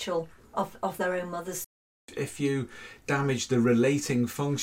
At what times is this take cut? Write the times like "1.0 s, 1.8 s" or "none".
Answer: 2.0 s